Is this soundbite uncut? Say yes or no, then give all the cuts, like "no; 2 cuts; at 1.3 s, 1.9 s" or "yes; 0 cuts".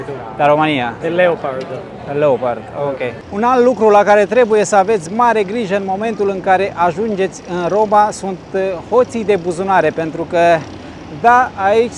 no; 2 cuts; at 1.0 s, 3.2 s